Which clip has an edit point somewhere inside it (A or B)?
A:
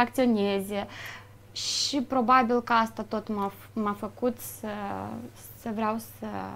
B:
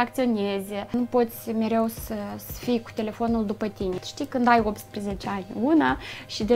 B